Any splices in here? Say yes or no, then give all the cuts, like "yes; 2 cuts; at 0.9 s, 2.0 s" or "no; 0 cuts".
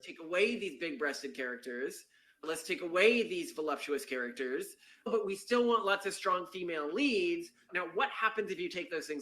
yes; 2 cuts; at 5.1 s, 7.7 s